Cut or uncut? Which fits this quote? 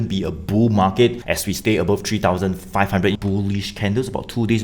cut